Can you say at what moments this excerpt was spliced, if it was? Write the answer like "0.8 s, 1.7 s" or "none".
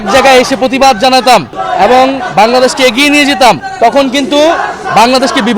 1.6 s, 3.7 s